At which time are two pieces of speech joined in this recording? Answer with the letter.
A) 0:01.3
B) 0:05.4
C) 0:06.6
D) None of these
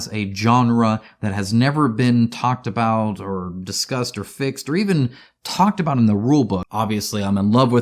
C